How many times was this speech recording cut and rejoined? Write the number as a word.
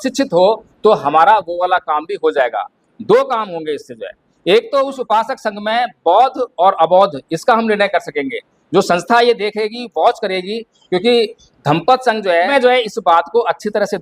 one